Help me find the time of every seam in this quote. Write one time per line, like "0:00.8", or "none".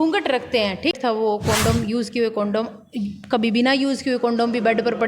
0:01.0